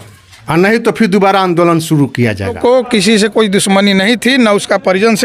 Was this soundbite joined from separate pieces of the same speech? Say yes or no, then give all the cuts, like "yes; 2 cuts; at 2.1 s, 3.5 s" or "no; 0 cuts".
yes; 1 cut; at 2.6 s